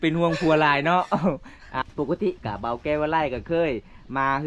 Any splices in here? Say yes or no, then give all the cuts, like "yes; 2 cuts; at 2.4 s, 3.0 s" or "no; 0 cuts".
yes; 1 cut; at 1.8 s